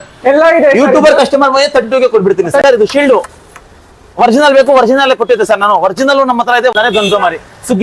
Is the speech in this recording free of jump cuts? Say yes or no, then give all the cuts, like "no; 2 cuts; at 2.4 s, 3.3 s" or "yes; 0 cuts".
no; 2 cuts; at 2.6 s, 6.7 s